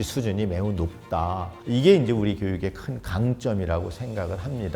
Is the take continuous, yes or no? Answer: no